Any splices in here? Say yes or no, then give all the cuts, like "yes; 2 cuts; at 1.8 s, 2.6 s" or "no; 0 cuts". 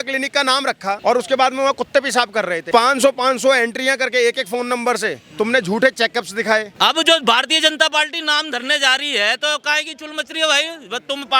yes; 3 cuts; at 1.0 s, 2.6 s, 6.7 s